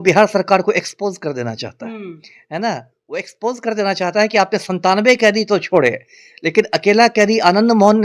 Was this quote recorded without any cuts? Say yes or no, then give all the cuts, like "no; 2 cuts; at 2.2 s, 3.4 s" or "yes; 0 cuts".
yes; 0 cuts